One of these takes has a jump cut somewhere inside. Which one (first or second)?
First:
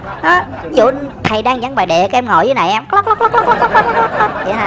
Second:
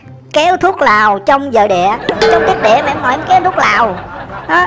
second